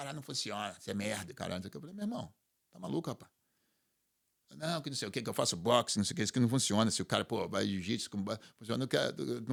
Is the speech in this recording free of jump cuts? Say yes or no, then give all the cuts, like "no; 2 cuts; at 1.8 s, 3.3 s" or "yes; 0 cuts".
yes; 0 cuts